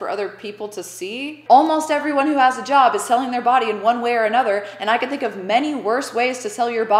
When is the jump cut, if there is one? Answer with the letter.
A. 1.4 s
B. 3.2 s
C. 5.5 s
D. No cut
A